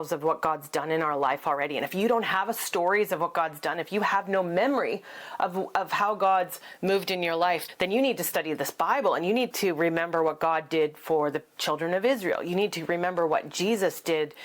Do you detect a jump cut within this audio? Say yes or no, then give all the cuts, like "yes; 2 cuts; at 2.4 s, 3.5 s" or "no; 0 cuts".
no; 0 cuts